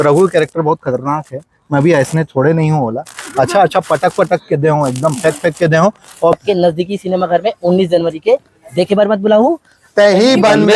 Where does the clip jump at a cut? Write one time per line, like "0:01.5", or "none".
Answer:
0:06.4